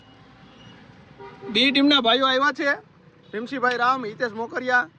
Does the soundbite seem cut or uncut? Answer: uncut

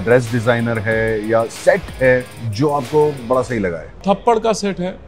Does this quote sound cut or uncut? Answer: cut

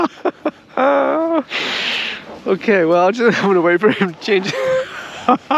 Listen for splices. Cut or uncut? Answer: uncut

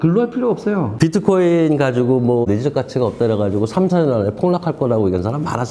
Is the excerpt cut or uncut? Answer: cut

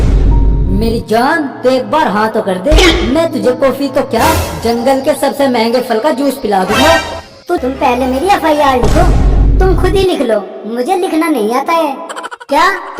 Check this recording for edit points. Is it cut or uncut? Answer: cut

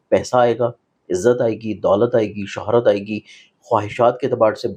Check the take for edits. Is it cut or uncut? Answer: uncut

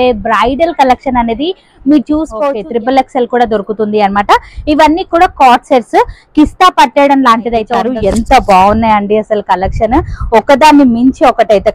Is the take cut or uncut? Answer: cut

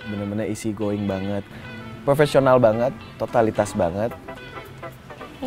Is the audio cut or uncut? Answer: cut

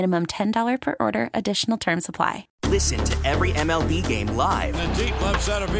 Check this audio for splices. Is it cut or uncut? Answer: cut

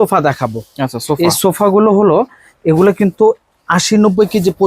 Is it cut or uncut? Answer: uncut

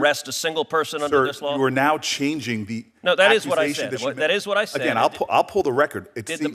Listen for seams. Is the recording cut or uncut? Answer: uncut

